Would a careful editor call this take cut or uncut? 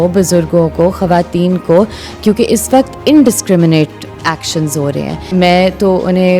cut